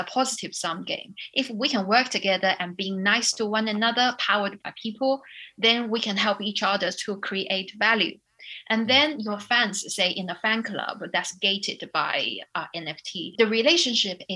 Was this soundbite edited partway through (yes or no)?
no